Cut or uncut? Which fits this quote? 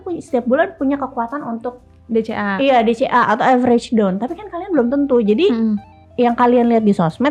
uncut